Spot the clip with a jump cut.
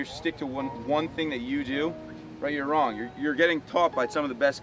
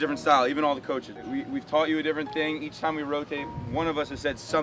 second; 1 cut; at 1.2 s

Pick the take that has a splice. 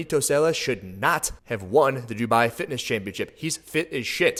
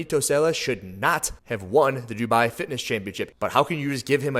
second; 1 cut; at 3.3 s

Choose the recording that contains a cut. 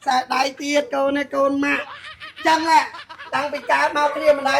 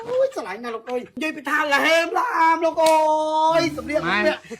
second; 1 cut; at 1.1 s

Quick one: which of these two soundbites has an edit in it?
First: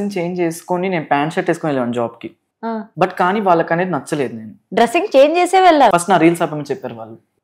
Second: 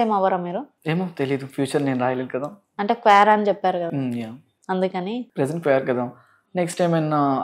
first; 3 cuts; at 2.8 s, 4.5 s, 5.9 s

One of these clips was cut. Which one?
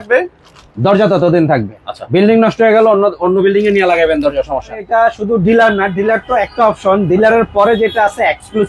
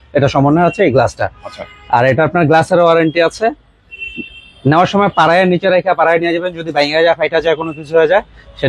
first; 1 cut; at 4.9 s

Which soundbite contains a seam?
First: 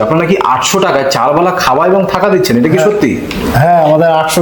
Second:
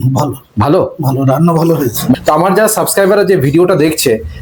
second; 1 cut; at 2.2 s

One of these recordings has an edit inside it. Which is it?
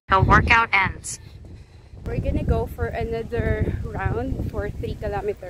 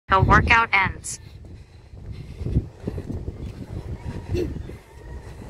first; 1 cut; at 2.0 s

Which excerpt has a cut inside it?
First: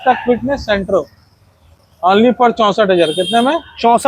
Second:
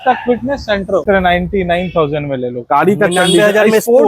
second; 1 cut; at 1.0 s

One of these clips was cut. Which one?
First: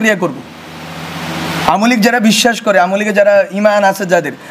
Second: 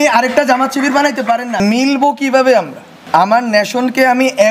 second; 2 cuts; at 1.6 s, 3.0 s

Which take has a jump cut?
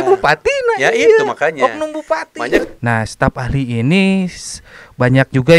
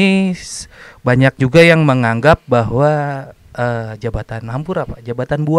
first; 1 cut; at 2.6 s

